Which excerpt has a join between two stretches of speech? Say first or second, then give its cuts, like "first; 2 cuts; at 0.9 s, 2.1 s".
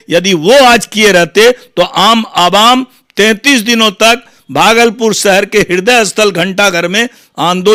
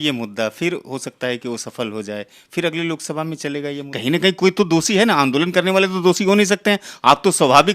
second; 1 cut; at 3.9 s